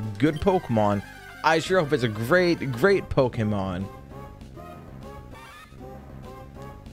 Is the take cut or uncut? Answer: uncut